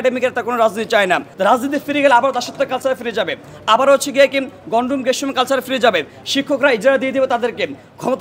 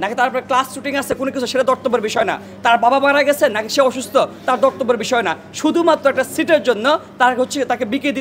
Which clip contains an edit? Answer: first; 1 cut; at 1.3 s

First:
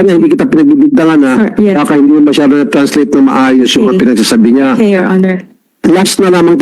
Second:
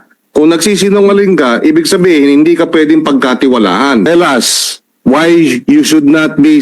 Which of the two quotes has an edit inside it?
second; 1 cut; at 4.1 s

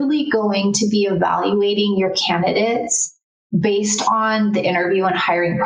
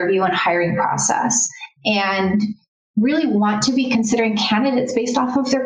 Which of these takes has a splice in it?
second; 1 cut; at 2.6 s

